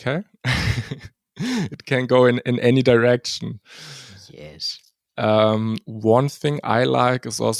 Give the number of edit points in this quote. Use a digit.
0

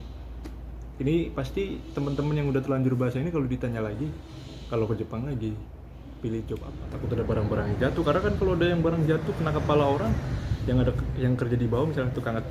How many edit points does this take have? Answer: 1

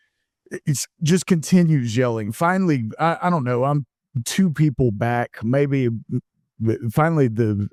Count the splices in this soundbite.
0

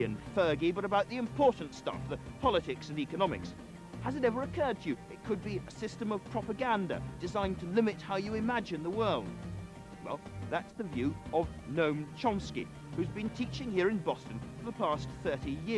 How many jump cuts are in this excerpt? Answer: 1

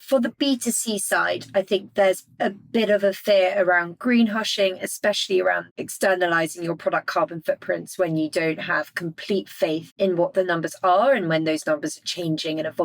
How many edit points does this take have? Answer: 3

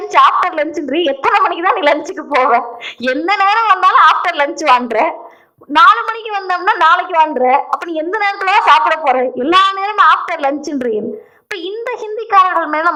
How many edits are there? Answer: 0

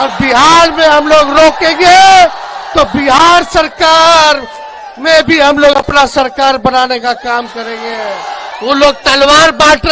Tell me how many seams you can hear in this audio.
1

